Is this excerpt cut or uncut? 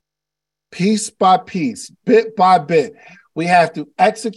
uncut